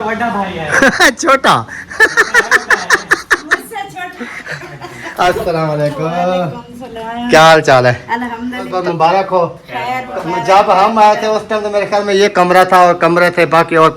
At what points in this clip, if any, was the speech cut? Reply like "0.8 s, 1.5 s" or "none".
8.7 s